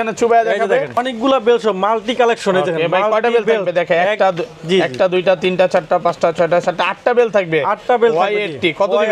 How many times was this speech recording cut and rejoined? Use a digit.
1